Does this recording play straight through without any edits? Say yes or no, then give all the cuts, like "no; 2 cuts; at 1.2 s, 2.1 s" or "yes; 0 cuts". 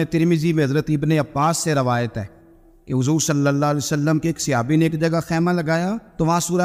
yes; 0 cuts